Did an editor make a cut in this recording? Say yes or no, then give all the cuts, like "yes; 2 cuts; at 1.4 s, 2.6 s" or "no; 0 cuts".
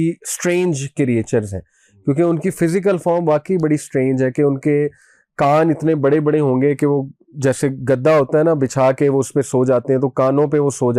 no; 0 cuts